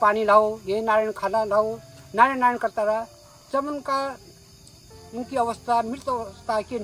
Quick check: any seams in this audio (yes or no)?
no